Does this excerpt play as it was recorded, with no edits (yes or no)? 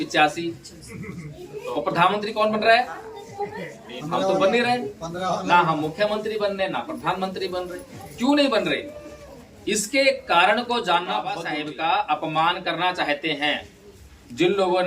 no